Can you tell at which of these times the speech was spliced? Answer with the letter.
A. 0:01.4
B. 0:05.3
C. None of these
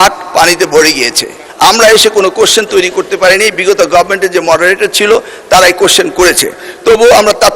A